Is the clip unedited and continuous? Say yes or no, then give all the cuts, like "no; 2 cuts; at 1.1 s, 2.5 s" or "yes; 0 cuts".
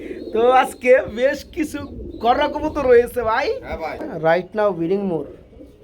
no; 1 cut; at 4.1 s